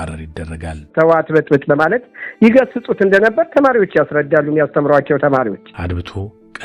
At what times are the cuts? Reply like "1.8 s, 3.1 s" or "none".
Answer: 0.9 s, 5.7 s